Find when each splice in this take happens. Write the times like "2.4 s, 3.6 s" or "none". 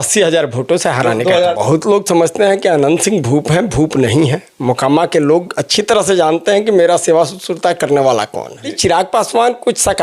1.5 s, 8.8 s